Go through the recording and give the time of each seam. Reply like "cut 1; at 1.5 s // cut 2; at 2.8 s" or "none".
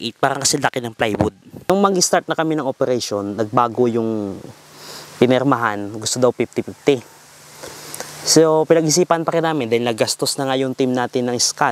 cut 1; at 1.7 s